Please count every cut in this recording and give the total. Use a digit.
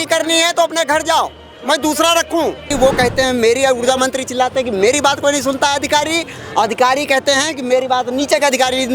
1